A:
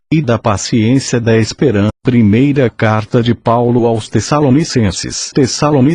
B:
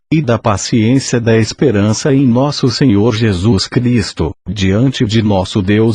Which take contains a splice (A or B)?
B